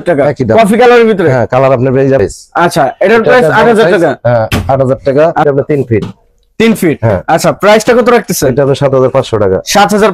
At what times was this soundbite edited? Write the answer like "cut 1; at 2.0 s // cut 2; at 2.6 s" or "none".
cut 1; at 2.2 s // cut 2; at 5.4 s